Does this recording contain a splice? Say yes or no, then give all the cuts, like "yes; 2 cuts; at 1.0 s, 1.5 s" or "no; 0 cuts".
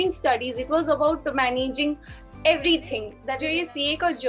yes; 1 cut; at 3.1 s